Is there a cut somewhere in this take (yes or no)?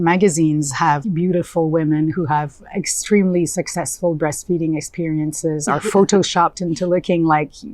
yes